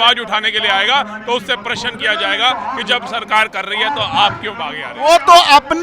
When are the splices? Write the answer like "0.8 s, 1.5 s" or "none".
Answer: 4.9 s

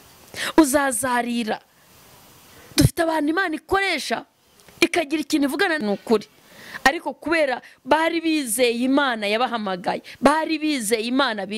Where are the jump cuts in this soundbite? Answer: 5.8 s

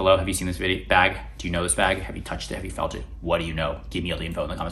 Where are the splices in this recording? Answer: none

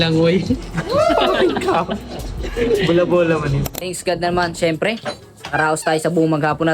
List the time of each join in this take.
3.9 s

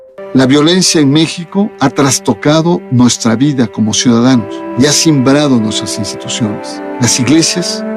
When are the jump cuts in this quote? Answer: 6.6 s

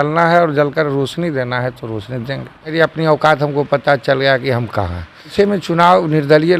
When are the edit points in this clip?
2.7 s, 5.3 s

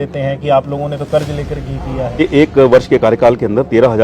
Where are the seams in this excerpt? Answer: 2.2 s

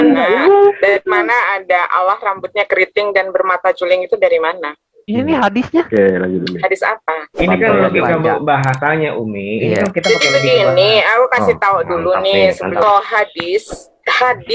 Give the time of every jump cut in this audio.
12.8 s

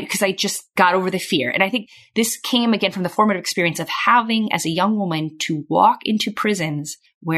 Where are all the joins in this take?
none

